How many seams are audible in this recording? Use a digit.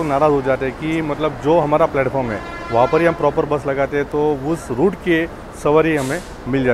0